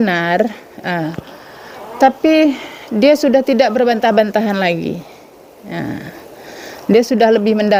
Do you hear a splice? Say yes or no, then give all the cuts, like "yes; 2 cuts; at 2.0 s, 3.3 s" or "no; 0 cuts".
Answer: no; 0 cuts